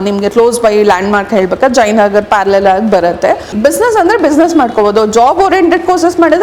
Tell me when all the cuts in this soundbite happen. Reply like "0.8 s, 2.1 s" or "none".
3.5 s

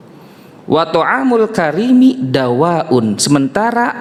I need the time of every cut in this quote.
none

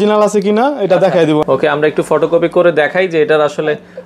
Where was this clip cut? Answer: 1.4 s

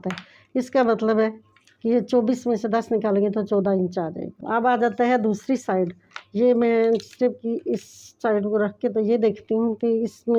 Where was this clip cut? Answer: none

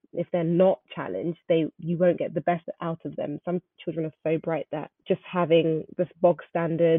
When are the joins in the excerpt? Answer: 2.6 s, 5.0 s

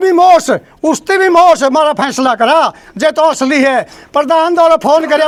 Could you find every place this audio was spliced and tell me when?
none

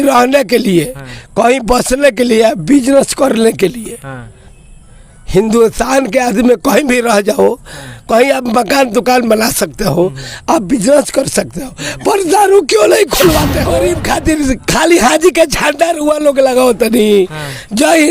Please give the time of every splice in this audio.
13.7 s

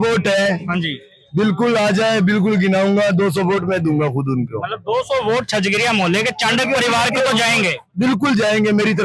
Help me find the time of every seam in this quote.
none

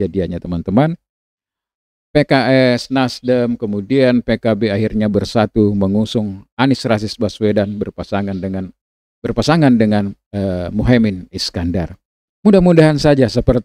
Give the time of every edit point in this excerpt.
8.8 s

